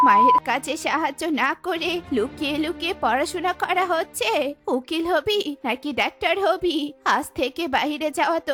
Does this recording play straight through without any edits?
yes; 0 cuts

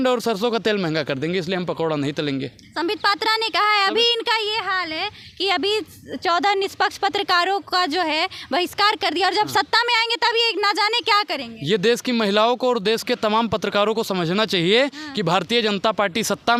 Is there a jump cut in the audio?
no; 0 cuts

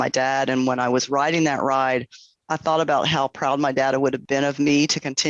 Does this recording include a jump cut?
yes; 1 cut; at 4.2 s

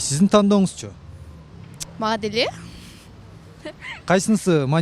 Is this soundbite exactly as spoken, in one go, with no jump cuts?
yes; 0 cuts

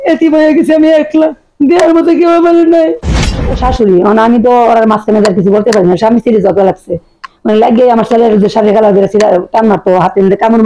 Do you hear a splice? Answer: yes; 1 cut; at 3.5 s

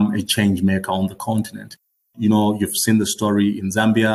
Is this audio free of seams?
yes; 0 cuts

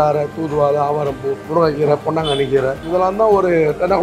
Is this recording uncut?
no; 2 cuts; at 1.4 s, 2.8 s

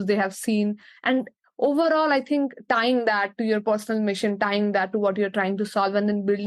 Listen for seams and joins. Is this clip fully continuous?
yes; 0 cuts

